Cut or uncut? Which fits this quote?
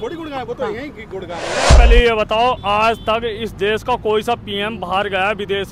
cut